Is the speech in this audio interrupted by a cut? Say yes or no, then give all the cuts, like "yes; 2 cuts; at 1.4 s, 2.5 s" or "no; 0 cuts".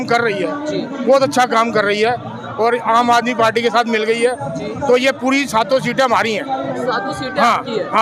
no; 0 cuts